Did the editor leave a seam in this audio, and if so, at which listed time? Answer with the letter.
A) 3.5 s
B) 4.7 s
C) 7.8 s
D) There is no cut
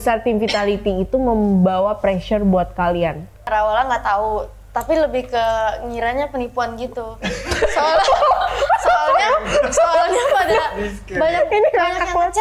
A